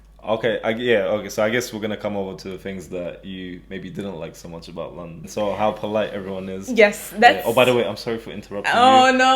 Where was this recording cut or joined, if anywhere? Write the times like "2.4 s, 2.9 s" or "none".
5.2 s

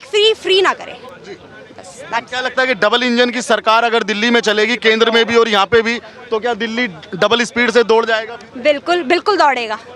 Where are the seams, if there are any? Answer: none

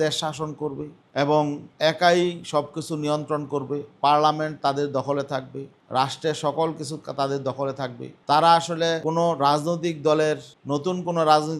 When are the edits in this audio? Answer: none

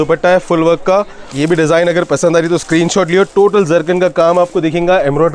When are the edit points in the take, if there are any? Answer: 1.3 s

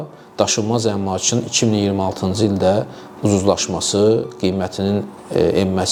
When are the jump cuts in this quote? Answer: none

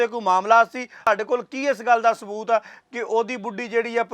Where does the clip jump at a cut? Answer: 1.1 s

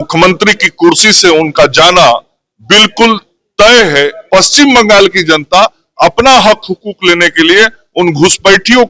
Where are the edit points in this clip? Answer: 4.2 s

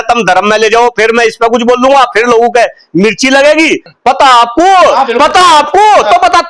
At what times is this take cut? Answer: 3.9 s

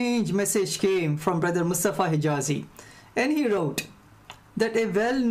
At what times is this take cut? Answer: 1.4 s, 2.6 s

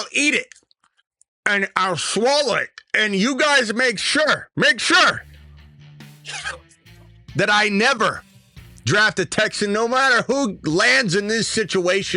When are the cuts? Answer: none

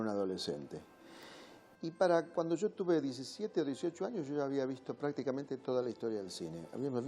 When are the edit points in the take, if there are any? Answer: 5.3 s

